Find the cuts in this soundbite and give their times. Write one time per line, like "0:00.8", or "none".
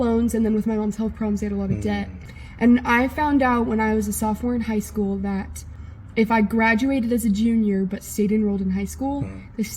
0:02.1